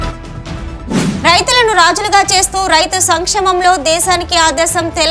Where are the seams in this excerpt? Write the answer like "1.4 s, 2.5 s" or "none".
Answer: 1.0 s

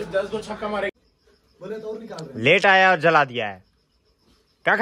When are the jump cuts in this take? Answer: 0.9 s

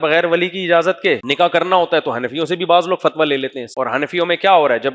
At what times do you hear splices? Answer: 1.3 s, 3.6 s

